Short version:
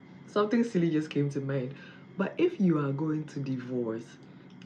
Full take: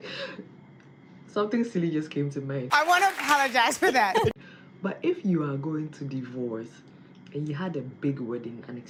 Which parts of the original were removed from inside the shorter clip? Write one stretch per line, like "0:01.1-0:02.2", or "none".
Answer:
0:02.7-0:04.3